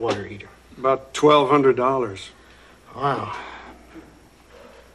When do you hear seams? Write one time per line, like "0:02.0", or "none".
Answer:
0:01.8